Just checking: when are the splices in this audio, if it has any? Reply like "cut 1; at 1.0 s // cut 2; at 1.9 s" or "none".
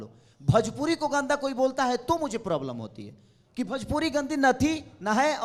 none